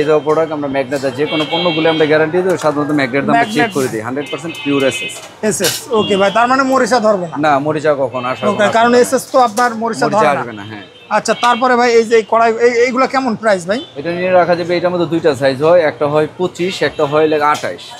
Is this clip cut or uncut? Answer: uncut